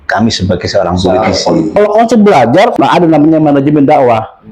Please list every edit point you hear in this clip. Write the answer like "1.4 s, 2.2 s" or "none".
1.7 s, 2.7 s